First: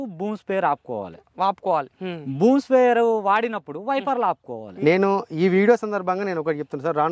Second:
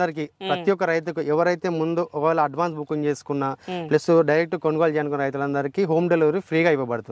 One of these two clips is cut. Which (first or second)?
first